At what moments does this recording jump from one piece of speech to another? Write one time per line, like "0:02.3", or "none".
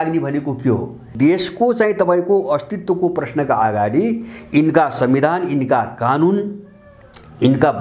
0:01.1